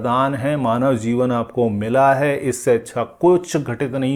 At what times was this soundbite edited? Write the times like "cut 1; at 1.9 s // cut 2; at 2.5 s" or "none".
none